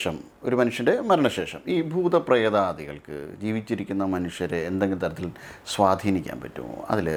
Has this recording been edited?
no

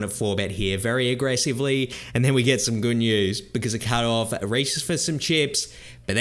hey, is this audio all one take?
no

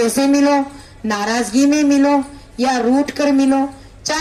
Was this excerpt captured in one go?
yes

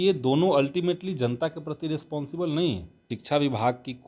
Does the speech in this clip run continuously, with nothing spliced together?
no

